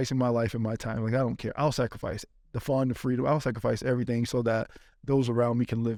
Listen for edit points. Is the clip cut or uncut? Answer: uncut